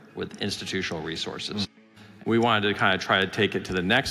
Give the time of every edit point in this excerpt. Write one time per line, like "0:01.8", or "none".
0:01.7